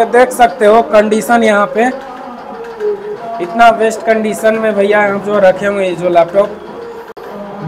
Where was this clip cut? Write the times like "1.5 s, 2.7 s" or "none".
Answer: none